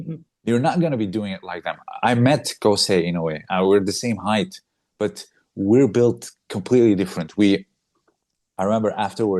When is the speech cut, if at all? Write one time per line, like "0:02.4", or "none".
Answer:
none